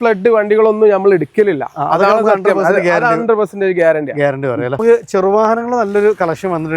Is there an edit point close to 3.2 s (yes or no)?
no